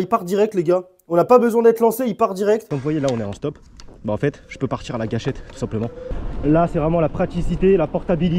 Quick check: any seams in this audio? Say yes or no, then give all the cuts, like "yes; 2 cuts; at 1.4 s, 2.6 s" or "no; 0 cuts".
yes; 2 cuts; at 2.7 s, 6.1 s